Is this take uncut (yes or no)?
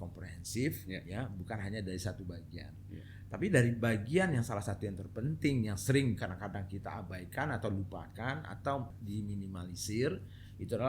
no